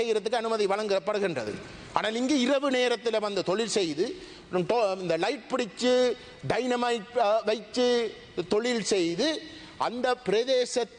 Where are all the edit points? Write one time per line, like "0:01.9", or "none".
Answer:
none